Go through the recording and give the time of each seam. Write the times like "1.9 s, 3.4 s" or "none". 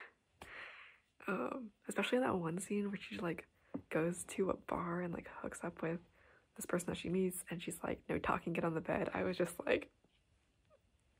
none